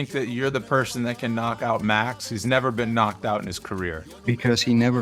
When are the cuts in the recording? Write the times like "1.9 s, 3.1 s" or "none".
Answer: 4.1 s

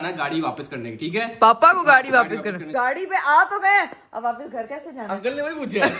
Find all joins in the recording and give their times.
2.6 s

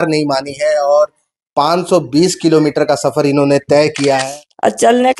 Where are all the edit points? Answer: 4.2 s

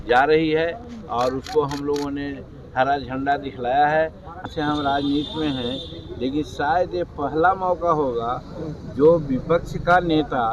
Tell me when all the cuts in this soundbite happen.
4.4 s

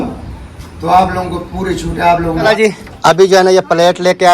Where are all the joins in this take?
2.3 s

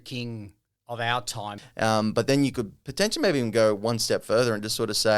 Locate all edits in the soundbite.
1.6 s

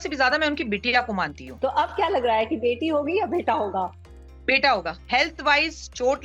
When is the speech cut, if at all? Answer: 1.4 s, 5.0 s

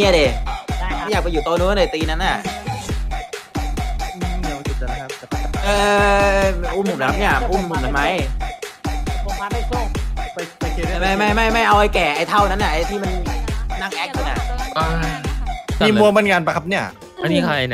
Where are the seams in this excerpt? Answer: 15.8 s

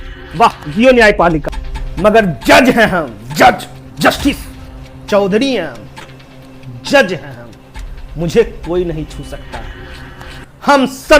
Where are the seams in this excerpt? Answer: 1.5 s

